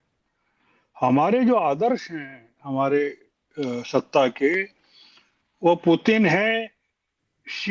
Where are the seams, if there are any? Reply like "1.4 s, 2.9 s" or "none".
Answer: none